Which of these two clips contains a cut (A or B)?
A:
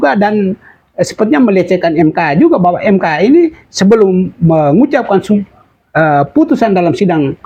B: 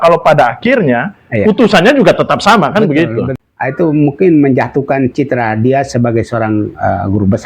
B